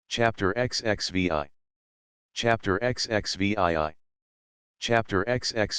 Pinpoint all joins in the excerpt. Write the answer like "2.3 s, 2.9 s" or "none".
1.0 s